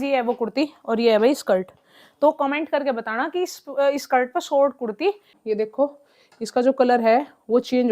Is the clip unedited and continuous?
no; 1 cut; at 5.3 s

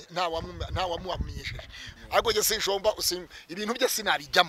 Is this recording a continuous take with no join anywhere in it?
no; 1 cut; at 1.9 s

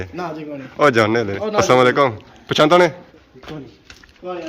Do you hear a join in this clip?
yes; 1 cut; at 3.0 s

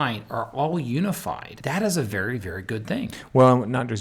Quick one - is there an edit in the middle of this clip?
yes; 1 cut; at 1.5 s

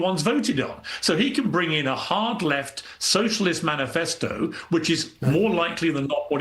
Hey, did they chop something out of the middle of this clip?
yes; 1 cut; at 1.1 s

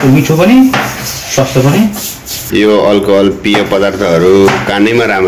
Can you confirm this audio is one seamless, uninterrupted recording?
no; 1 cut; at 2.4 s

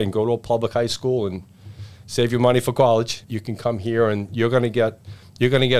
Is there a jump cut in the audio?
no; 0 cuts

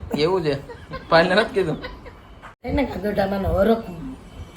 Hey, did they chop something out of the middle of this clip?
yes; 1 cut; at 2.7 s

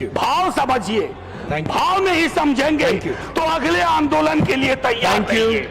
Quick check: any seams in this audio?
no; 0 cuts

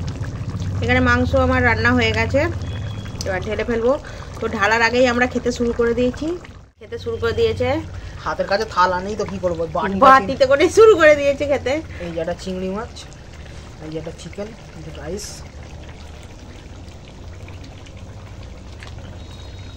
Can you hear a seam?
no; 0 cuts

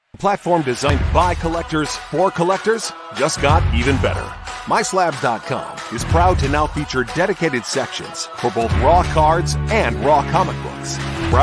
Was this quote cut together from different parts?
yes; 1 cut; at 0.9 s

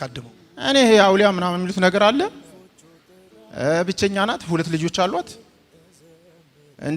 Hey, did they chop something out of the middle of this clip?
no; 0 cuts

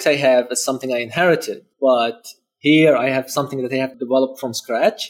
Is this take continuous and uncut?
no; 2 cuts; at 1.6 s, 3.9 s

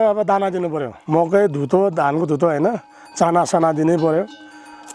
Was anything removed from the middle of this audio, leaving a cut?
yes; 1 cut; at 1.0 s

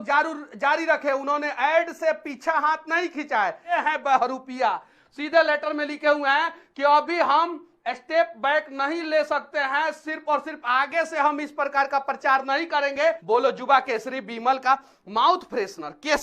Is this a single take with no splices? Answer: no; 2 cuts; at 3.8 s, 13.2 s

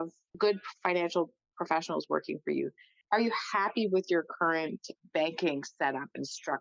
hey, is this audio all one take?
yes; 0 cuts

